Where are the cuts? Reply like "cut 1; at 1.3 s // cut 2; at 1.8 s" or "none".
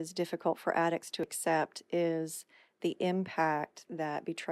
cut 1; at 1.3 s